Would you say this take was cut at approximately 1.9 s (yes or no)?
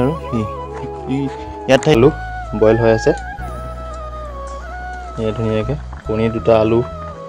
yes